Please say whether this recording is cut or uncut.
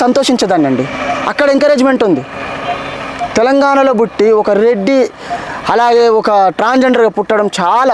uncut